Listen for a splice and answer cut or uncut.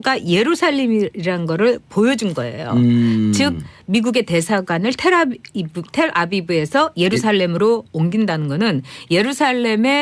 cut